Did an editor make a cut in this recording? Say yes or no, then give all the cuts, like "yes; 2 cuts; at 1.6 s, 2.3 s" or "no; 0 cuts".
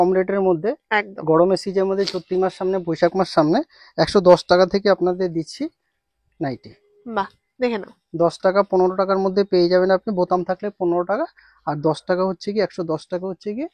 no; 0 cuts